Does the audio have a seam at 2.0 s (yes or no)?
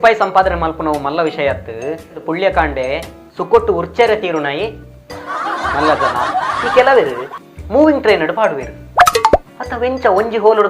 no